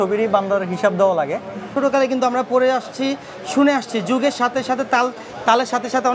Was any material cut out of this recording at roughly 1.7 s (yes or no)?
yes